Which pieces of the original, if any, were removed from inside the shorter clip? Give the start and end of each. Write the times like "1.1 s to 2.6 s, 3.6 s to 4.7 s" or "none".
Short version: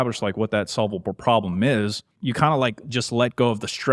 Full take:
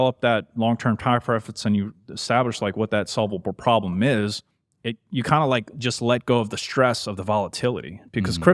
4.5 s to 5.0 s